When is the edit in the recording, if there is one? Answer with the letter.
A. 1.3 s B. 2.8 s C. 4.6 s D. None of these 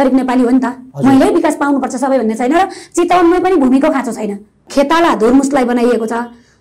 C